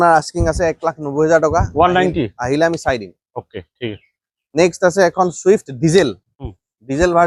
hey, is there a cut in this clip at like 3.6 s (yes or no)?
no